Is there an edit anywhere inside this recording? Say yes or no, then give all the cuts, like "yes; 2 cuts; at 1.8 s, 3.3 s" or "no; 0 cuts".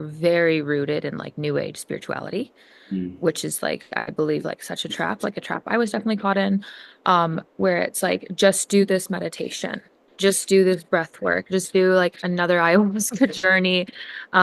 no; 0 cuts